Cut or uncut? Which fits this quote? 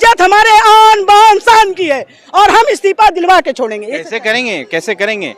uncut